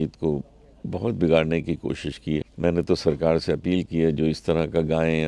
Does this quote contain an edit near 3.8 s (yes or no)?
no